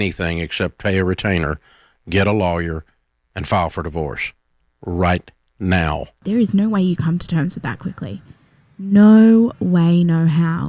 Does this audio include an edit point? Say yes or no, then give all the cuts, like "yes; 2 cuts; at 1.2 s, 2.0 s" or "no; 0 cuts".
yes; 1 cut; at 6.1 s